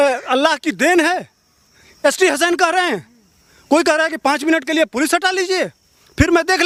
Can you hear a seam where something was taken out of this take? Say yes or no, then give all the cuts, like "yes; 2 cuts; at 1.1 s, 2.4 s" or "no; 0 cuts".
no; 0 cuts